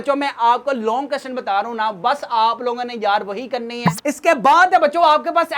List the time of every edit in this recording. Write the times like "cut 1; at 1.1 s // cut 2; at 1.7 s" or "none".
none